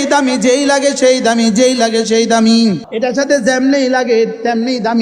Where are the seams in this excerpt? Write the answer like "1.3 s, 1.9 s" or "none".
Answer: 2.9 s